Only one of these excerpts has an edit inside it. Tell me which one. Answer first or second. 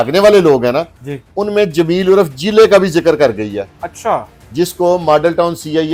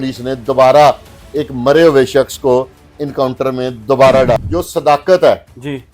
second